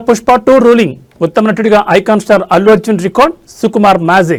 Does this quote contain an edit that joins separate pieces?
no; 0 cuts

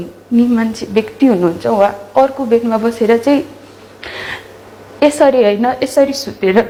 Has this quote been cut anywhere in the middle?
no; 0 cuts

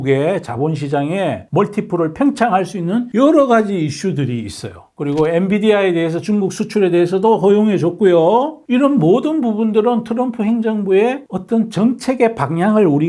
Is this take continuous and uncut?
yes; 0 cuts

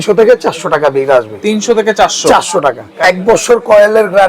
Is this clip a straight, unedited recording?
no; 1 cut; at 2.9 s

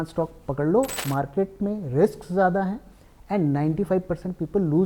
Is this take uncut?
no; 1 cut; at 1.0 s

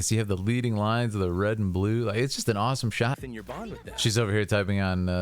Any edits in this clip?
yes; 1 cut; at 3.2 s

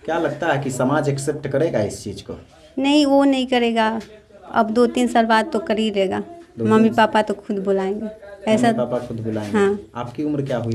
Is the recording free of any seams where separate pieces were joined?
yes; 0 cuts

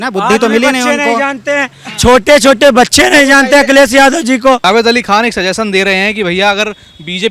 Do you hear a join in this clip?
yes; 1 cut; at 4.6 s

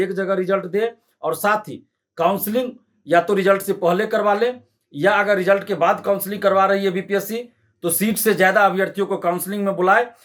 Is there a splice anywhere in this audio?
no; 0 cuts

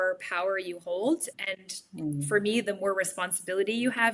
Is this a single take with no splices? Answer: yes; 0 cuts

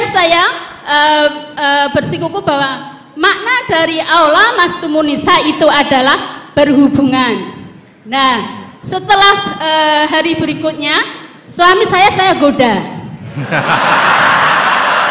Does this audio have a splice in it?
no; 0 cuts

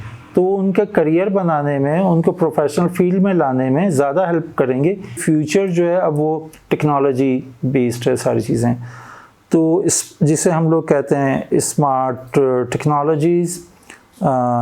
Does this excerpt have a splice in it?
yes; 1 cut; at 5.2 s

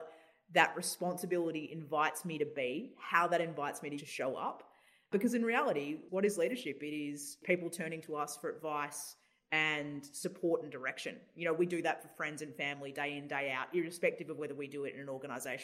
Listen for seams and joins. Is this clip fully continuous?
no; 4 cuts; at 4.0 s, 5.1 s, 6.0 s, 7.4 s

